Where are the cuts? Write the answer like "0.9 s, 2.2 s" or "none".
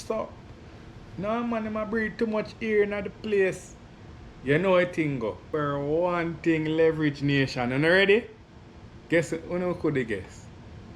5.4 s